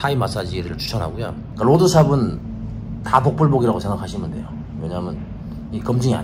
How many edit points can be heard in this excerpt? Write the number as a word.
one